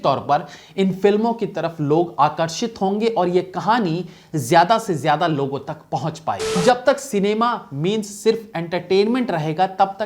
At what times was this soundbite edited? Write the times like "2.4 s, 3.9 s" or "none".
6.6 s